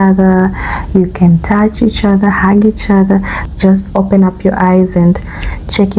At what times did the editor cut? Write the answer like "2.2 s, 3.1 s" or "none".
3.4 s